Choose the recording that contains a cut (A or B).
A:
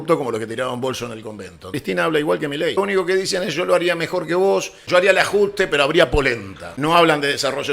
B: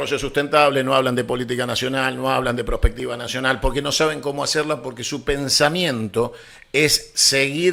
A